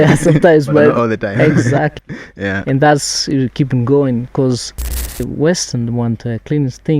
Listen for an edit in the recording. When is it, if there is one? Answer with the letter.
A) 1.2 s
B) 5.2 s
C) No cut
B